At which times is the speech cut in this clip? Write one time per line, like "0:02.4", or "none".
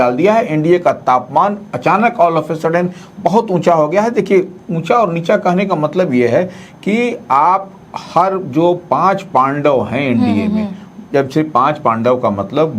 none